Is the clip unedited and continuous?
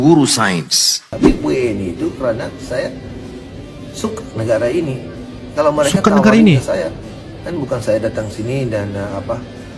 no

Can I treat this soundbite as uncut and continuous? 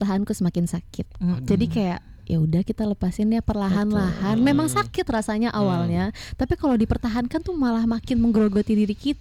yes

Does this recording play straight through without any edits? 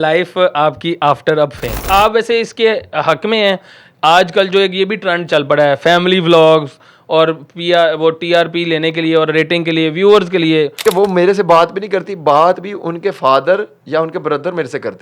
no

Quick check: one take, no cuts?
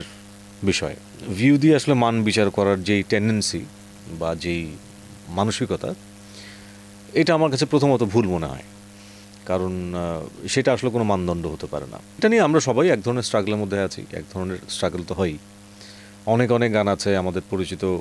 yes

